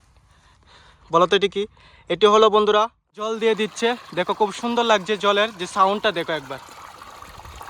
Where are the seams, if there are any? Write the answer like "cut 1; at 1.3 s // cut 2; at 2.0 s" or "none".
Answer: cut 1; at 3.3 s